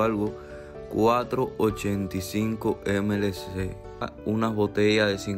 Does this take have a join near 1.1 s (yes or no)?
no